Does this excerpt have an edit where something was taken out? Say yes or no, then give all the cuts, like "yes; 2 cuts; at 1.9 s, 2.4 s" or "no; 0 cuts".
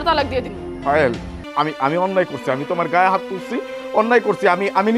yes; 1 cut; at 1.4 s